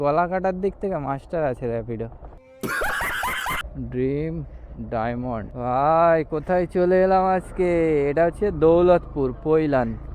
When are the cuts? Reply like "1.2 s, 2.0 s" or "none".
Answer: 3.6 s, 5.5 s